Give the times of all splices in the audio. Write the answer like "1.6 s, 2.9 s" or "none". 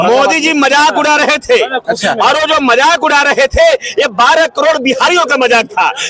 none